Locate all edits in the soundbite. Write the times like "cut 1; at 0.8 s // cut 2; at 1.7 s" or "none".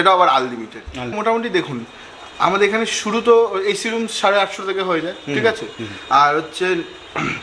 cut 1; at 1.1 s